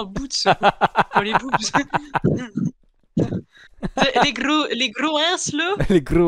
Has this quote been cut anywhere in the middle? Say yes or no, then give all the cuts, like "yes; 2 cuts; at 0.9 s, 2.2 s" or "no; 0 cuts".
no; 0 cuts